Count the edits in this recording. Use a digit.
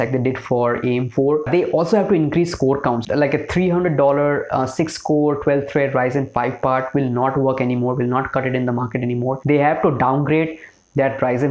3